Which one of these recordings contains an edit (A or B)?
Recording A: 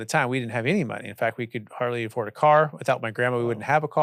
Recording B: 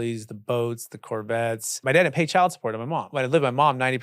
B